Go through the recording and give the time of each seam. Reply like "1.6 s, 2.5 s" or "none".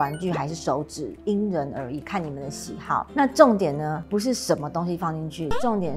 none